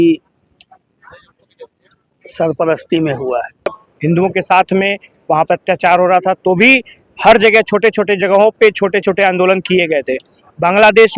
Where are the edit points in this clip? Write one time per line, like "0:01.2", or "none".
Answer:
0:03.9